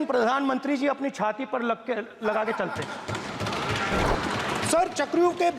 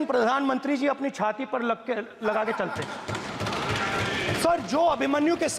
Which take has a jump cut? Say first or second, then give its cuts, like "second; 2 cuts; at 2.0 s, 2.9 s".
first; 1 cut; at 4.0 s